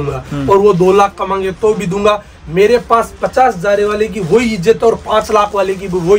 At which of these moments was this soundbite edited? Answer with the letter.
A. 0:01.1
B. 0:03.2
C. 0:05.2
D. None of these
D